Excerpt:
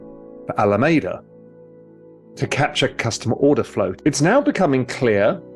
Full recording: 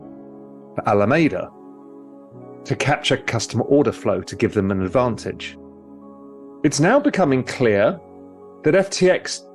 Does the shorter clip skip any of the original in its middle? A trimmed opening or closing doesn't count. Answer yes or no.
yes